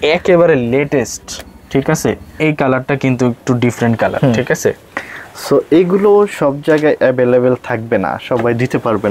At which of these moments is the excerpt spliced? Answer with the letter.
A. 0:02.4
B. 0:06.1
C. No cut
A